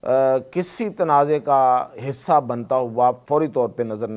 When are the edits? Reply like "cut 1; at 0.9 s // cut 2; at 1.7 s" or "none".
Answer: cut 1; at 3.2 s

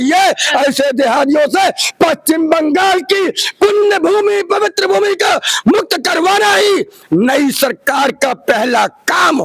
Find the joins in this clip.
none

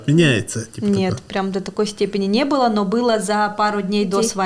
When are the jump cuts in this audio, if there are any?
none

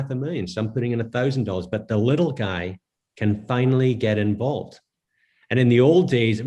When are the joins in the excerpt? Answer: none

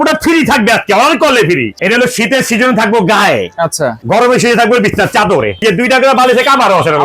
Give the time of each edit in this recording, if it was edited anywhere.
cut 1; at 1.7 s // cut 2; at 4.0 s // cut 3; at 5.6 s

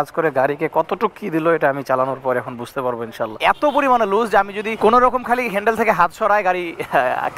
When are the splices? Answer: cut 1; at 3.4 s // cut 2; at 4.6 s

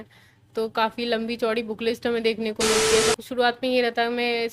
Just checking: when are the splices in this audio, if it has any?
cut 1; at 3.1 s

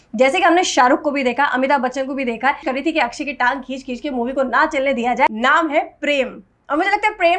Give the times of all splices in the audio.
cut 1; at 2.7 s // cut 2; at 5.3 s

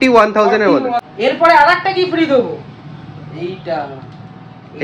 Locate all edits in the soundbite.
cut 1; at 1.1 s

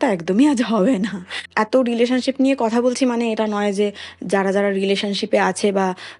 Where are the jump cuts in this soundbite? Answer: cut 1; at 1.4 s

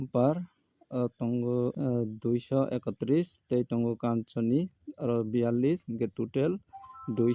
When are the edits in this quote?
cut 1; at 1.8 s

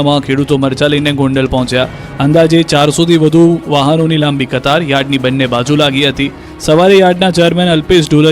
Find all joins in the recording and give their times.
cut 1; at 1.3 s

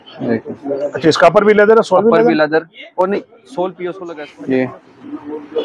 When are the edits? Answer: cut 1; at 4.0 s

